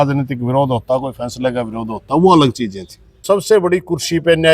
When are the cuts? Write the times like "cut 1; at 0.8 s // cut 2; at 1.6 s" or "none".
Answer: cut 1; at 3.2 s